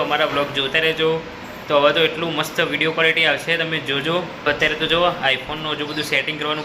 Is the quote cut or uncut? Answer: cut